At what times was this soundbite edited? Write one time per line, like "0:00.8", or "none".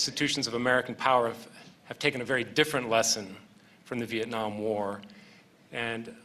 0:04.4

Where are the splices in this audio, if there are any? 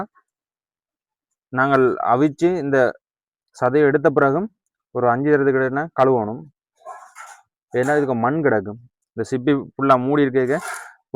none

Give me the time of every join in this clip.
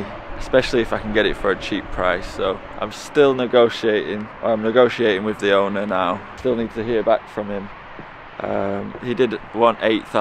none

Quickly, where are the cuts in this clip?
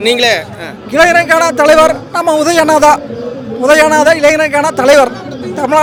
none

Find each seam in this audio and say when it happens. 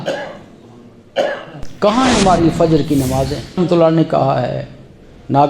0:03.6

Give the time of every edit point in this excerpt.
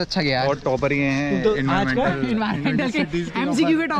none

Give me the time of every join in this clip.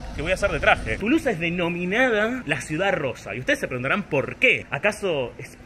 none

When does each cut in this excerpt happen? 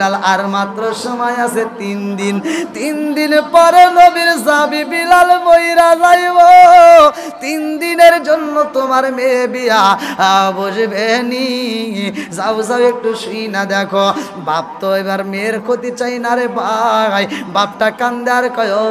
none

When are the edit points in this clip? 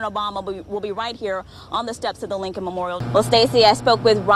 0:03.0

